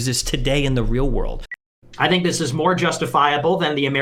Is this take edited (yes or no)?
yes